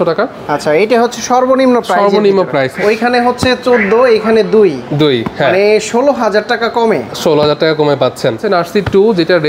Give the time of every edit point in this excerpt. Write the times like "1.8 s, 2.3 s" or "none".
2.7 s, 8.4 s